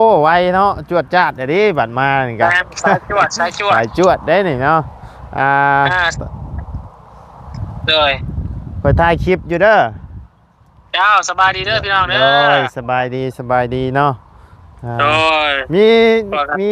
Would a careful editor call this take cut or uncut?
uncut